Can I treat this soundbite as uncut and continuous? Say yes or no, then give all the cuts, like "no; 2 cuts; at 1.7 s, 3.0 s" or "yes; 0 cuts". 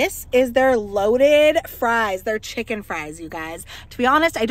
yes; 0 cuts